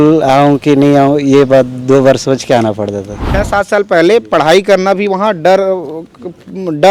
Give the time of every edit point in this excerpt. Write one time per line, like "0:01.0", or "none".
0:03.2